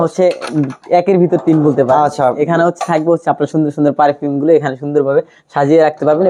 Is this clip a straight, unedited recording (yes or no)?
yes